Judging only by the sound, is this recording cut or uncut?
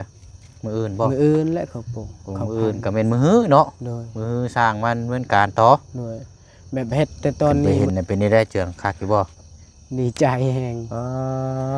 cut